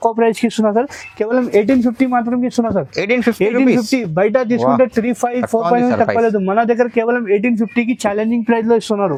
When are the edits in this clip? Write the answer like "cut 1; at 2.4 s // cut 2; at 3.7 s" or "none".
none